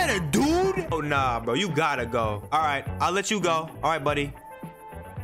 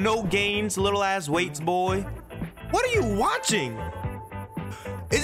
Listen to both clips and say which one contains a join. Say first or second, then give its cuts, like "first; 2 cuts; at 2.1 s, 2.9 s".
first; 3 cuts; at 0.9 s, 2.4 s, 3.7 s